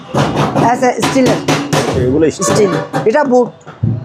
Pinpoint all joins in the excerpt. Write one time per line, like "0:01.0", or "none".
none